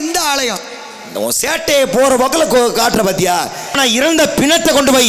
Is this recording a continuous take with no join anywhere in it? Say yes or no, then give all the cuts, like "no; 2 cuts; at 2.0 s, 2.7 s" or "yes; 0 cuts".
no; 1 cut; at 3.7 s